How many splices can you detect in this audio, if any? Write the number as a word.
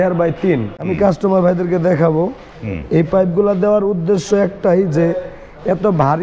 two